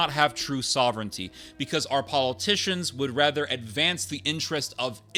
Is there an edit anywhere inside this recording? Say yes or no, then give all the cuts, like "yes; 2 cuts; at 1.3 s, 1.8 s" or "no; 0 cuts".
no; 0 cuts